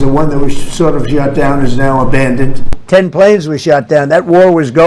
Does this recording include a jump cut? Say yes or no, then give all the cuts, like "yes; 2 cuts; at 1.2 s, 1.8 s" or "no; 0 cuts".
yes; 1 cut; at 2.7 s